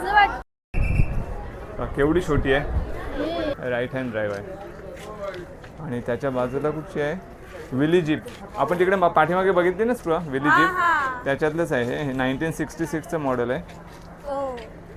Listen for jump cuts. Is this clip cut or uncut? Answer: cut